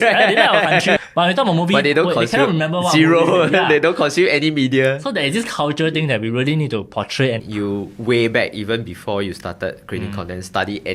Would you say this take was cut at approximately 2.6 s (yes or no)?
no